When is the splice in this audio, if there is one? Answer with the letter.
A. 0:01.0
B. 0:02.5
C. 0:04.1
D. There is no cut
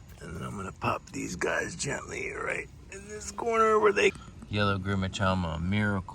C